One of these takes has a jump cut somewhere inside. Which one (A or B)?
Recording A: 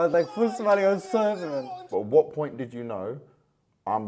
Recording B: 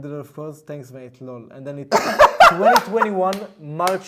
A